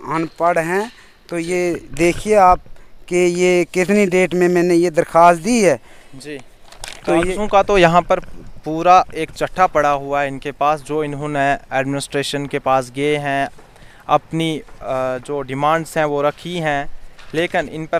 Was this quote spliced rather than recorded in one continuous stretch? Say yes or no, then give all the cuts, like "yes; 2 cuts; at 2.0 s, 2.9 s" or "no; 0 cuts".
no; 0 cuts